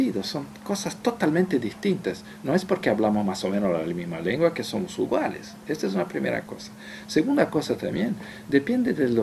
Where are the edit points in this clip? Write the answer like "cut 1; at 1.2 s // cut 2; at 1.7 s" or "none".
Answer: cut 1; at 1.9 s